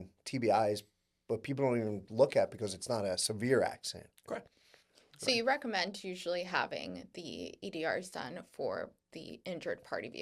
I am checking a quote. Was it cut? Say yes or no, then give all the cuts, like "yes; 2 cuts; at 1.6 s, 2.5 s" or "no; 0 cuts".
no; 0 cuts